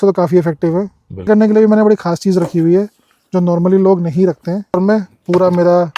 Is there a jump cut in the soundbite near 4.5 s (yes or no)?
yes